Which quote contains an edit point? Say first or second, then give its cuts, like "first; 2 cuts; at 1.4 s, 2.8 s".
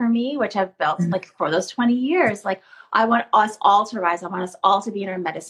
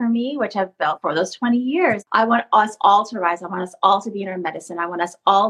second; 2 cuts; at 1.0 s, 2.0 s